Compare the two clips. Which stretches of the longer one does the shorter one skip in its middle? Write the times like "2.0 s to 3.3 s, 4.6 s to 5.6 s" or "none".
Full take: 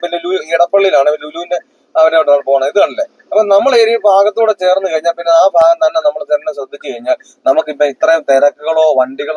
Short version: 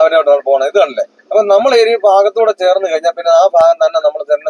none